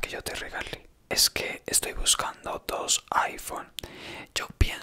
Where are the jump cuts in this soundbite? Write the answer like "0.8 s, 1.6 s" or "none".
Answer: 1.1 s